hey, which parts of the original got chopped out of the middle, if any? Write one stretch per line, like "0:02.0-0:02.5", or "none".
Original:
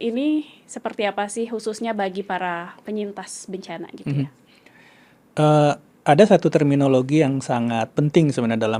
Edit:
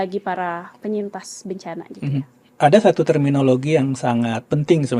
0:04.5-0:05.9